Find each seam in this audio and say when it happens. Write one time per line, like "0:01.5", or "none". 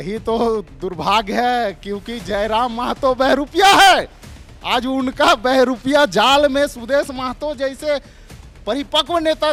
none